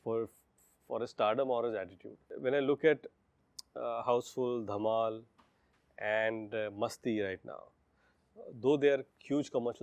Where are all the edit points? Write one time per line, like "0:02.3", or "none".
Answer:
0:02.3